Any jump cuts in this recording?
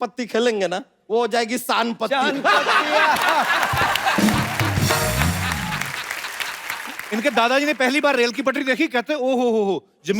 yes; 2 cuts; at 0.9 s, 7.0 s

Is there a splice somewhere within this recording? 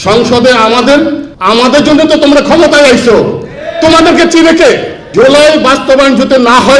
yes; 2 cuts; at 1.3 s, 5.0 s

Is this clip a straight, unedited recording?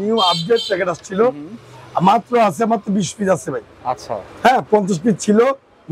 yes; 0 cuts

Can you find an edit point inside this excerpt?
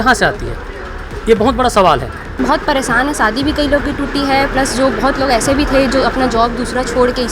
yes; 1 cut; at 2.4 s

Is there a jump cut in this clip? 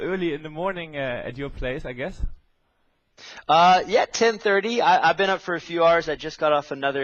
yes; 1 cut; at 5.8 s

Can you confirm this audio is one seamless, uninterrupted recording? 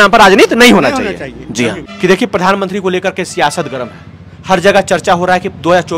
yes; 0 cuts

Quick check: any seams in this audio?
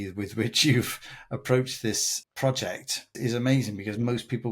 yes; 2 cuts; at 2.1 s, 3.1 s

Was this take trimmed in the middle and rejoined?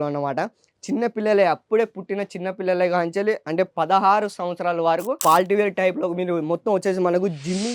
yes; 1 cut; at 5.2 s

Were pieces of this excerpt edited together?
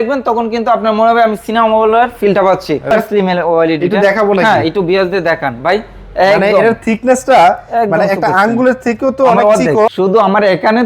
yes; 2 cuts; at 2.9 s, 9.9 s

